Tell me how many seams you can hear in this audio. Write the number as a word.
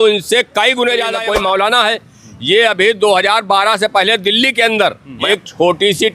two